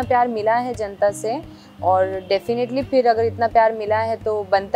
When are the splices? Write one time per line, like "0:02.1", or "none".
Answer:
none